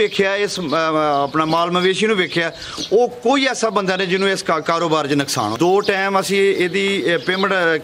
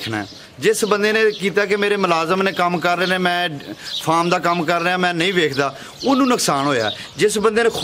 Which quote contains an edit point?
first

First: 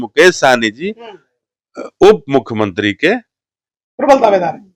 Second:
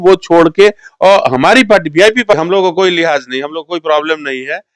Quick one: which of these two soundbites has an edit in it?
second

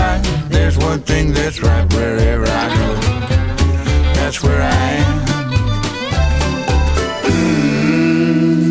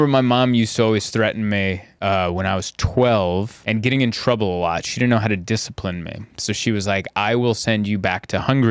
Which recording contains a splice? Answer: second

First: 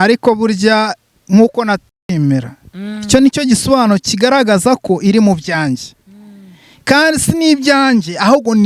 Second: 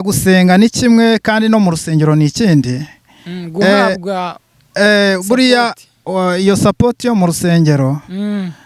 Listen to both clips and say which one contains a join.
first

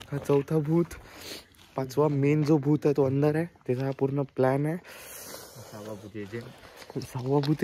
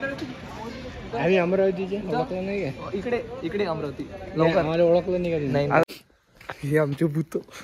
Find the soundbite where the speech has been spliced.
second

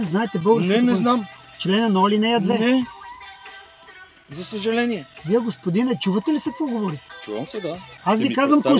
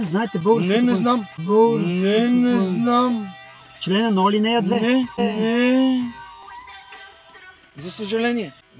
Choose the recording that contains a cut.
first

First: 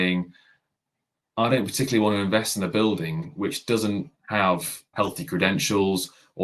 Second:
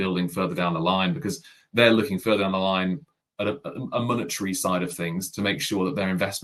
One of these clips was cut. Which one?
first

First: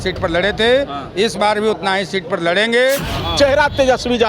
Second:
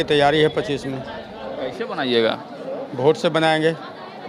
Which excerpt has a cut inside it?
first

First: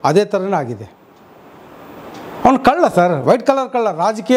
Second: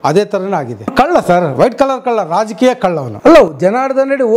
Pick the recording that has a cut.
second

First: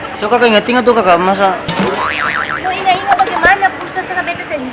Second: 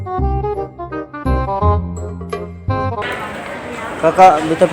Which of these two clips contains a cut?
second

